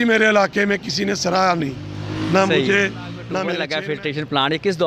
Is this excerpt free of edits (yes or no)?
no